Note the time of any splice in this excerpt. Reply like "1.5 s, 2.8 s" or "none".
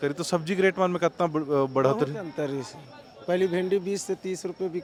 none